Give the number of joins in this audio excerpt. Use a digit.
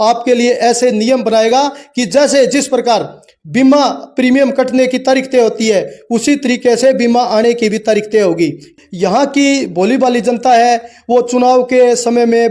1